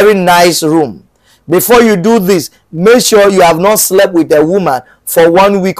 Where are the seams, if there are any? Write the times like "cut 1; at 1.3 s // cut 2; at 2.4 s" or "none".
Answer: none

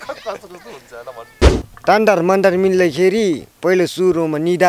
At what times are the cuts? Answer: cut 1; at 1.6 s

